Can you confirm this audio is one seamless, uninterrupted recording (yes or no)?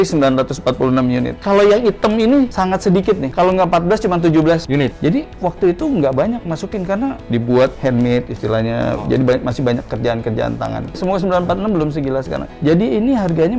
no